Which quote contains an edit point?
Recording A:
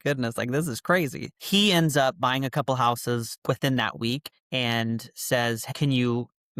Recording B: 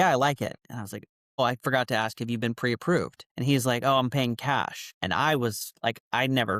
A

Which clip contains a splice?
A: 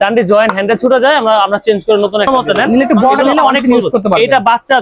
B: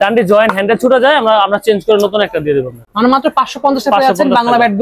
A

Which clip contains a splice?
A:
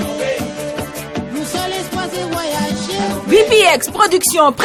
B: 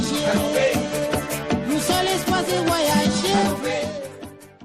B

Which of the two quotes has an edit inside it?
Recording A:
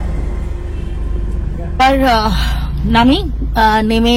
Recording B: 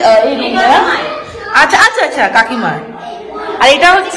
A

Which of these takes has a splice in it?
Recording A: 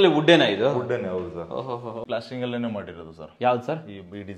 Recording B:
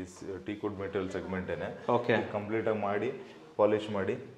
A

